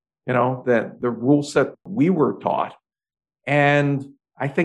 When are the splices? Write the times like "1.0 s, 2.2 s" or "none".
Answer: 1.9 s